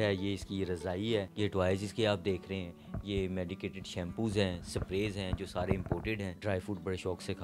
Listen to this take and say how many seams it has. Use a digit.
2